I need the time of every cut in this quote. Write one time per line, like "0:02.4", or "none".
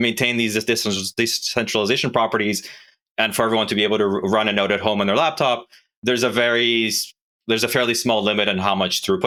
none